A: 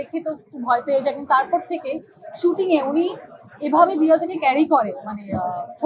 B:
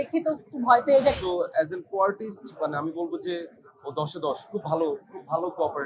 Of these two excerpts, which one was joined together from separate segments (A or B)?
B